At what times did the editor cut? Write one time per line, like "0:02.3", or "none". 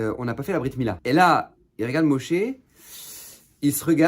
0:01.0